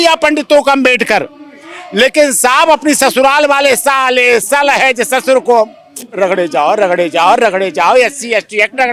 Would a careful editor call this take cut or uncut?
uncut